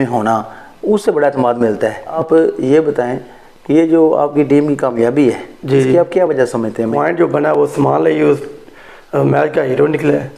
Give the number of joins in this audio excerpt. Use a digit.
2